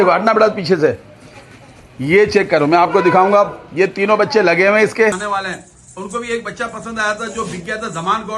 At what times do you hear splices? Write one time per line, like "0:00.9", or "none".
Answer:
0:05.2